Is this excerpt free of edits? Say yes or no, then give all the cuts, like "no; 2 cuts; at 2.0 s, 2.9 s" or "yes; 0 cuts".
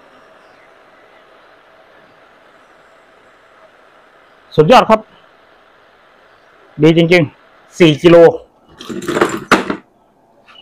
no; 1 cut; at 7.7 s